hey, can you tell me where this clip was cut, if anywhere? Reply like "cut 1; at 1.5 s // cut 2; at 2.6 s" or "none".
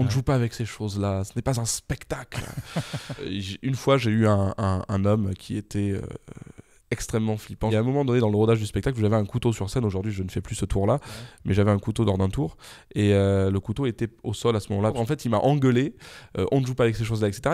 cut 1; at 3.3 s // cut 2; at 7.7 s // cut 3; at 14.9 s